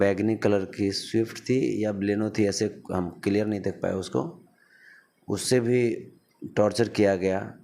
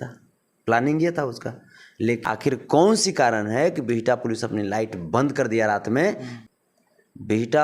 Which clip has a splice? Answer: second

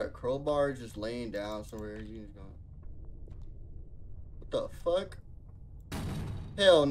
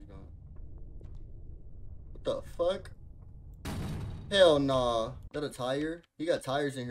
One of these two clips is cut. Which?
second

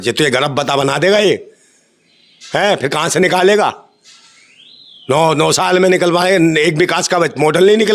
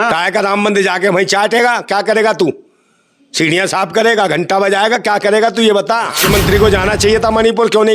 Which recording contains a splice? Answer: second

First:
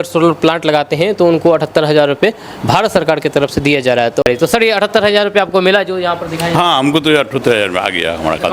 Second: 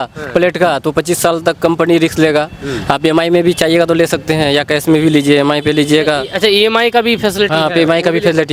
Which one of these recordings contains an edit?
first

